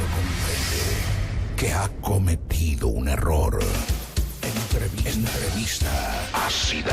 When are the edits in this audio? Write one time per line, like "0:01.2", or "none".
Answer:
0:00.9